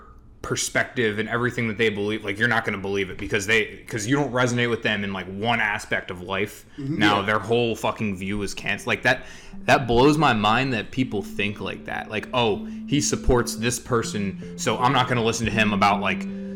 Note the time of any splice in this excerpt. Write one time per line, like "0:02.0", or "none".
none